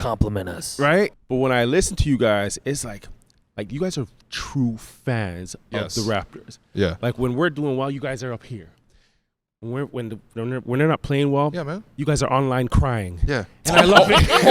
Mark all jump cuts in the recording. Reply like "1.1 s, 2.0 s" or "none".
1.1 s